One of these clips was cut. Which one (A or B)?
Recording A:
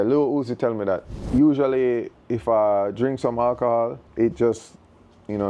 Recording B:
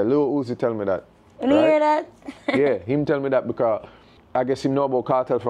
A